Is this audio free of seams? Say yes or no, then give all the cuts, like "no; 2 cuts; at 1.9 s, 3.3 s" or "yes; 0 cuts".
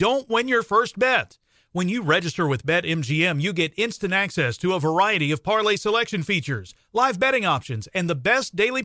yes; 0 cuts